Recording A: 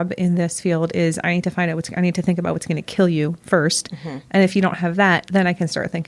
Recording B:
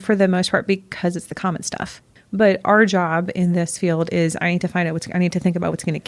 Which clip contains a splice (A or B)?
B